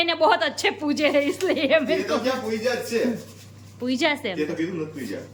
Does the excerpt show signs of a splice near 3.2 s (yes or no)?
no